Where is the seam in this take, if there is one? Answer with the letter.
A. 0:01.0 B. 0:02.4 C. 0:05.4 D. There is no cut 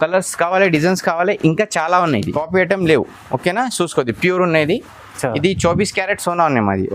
B